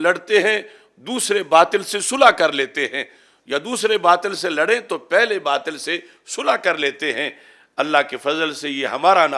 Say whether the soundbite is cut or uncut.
uncut